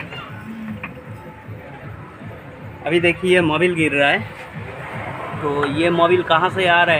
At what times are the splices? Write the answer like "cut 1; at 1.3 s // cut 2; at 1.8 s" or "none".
none